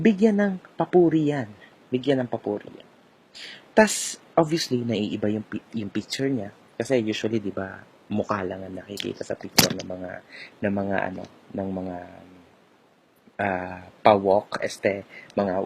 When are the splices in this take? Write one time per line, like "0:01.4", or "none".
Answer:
0:11.0